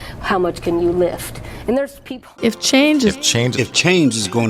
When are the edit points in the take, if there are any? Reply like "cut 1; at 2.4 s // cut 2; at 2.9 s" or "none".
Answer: cut 1; at 2.1 s